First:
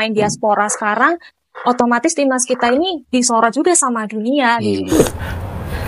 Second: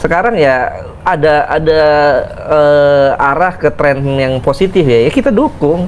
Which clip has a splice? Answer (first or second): first